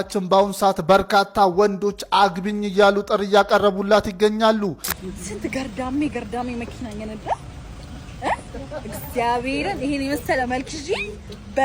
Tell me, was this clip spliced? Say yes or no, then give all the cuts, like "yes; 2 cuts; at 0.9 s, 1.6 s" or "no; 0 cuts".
yes; 1 cut; at 4.9 s